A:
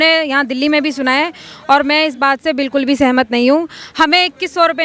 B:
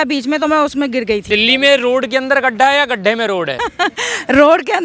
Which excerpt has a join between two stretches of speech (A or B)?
B